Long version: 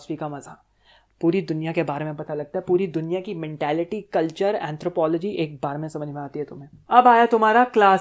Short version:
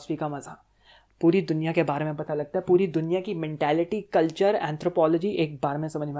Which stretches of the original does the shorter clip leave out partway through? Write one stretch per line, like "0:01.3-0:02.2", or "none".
none